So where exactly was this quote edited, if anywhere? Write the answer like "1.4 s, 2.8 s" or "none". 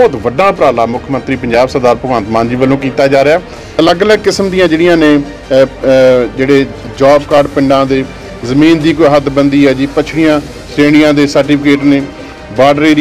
3.6 s